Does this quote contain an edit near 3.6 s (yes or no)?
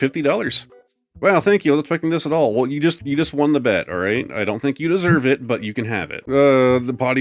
no